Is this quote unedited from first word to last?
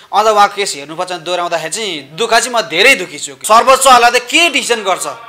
no; 1 cut; at 3.3 s

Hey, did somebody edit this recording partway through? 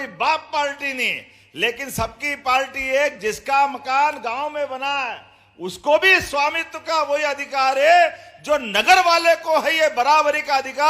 no; 0 cuts

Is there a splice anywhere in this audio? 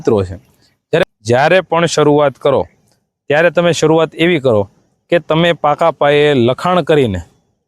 yes; 1 cut; at 1.0 s

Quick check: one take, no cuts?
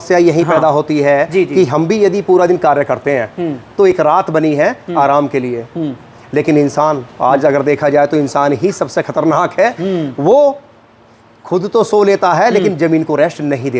yes; 0 cuts

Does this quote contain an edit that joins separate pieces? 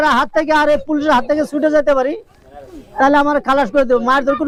no; 0 cuts

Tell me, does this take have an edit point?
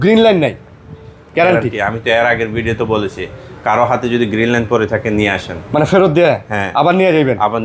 no; 0 cuts

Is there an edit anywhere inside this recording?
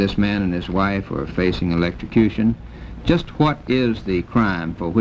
no; 0 cuts

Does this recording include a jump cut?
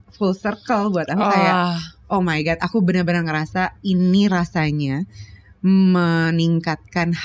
no; 0 cuts

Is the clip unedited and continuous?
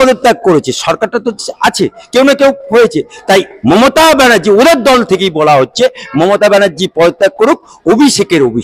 yes; 0 cuts

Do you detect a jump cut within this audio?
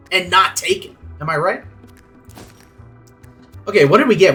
no; 0 cuts

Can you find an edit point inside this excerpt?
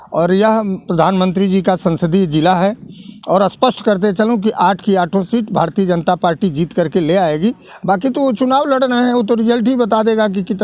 no; 0 cuts

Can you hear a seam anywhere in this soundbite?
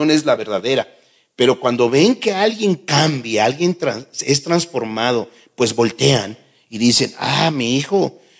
no; 0 cuts

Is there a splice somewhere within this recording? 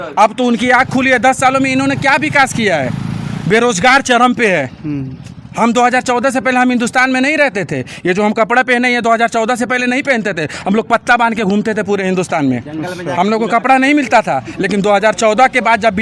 no; 0 cuts

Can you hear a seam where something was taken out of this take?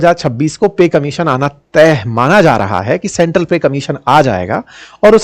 no; 0 cuts

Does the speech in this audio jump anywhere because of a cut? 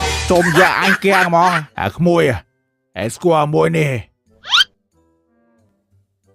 yes; 1 cut; at 1.7 s

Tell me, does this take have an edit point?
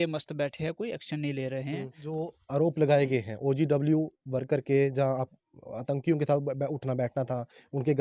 yes; 1 cut; at 1.8 s

